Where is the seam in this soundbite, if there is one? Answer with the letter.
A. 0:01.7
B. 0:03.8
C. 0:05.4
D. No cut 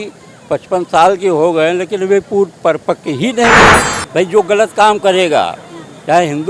B